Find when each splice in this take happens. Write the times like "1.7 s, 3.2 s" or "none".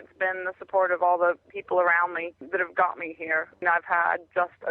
1.5 s, 2.4 s, 3.6 s